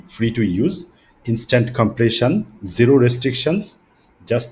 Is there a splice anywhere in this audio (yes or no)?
no